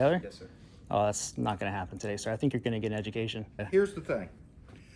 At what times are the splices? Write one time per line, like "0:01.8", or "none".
0:03.6